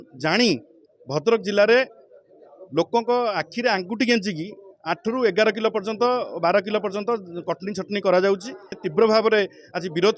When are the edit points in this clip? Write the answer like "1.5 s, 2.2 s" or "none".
8.8 s